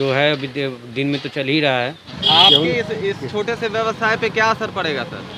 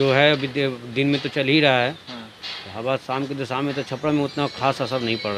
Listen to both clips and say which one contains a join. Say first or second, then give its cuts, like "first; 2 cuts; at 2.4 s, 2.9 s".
first; 1 cut; at 2.1 s